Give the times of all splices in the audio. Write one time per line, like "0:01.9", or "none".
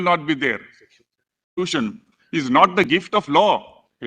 0:01.6